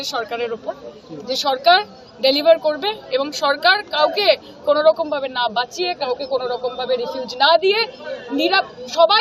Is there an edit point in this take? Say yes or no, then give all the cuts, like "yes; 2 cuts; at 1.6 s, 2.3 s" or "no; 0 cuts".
no; 0 cuts